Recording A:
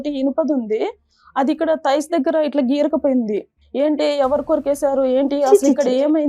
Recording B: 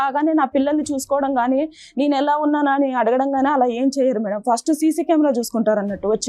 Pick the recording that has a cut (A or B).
A